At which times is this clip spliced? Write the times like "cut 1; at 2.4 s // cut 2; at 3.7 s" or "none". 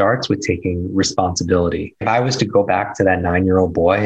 cut 1; at 2.0 s